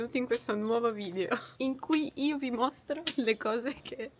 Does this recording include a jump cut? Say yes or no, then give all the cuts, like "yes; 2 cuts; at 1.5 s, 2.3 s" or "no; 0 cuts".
yes; 1 cut; at 1.5 s